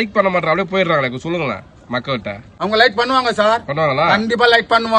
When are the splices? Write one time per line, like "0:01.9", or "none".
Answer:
none